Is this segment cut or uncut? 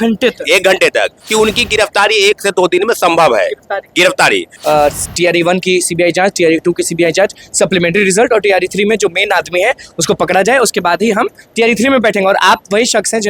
cut